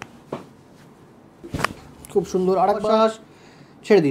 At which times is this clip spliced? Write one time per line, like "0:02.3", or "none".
0:02.8